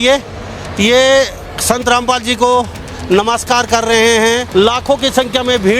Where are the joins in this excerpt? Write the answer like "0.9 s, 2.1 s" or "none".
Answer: 4.5 s